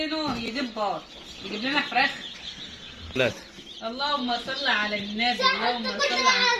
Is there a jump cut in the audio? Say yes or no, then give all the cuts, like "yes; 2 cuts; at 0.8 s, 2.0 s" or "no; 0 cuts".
no; 0 cuts